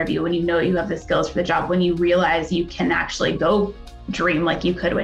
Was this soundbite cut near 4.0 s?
no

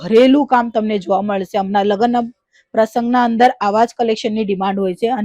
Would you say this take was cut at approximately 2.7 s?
no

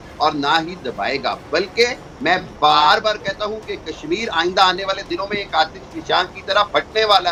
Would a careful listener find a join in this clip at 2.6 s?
no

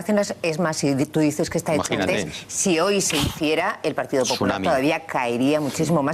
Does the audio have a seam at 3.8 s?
yes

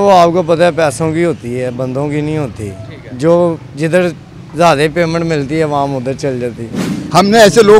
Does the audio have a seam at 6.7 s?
yes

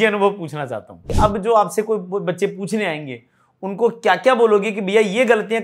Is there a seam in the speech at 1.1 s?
yes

